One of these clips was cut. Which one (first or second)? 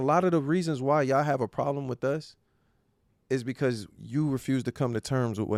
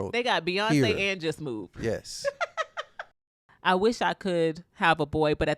second